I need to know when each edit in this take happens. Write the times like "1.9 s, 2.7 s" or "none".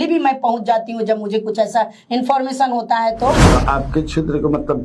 3.4 s